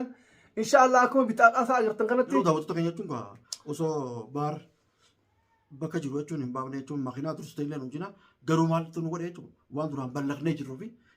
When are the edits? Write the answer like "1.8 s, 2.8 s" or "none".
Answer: 2.4 s